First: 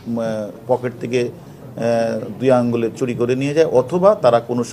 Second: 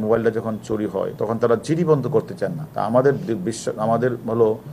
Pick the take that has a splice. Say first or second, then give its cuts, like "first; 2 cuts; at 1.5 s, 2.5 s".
second; 2 cuts; at 1.1 s, 2.6 s